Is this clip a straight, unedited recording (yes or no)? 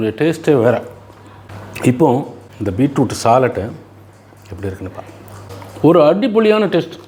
yes